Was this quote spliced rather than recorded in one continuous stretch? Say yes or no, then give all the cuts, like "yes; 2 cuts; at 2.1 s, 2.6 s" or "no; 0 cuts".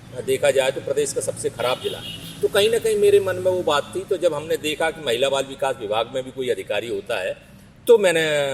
no; 0 cuts